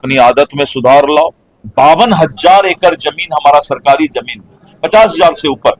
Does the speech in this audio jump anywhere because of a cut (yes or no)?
yes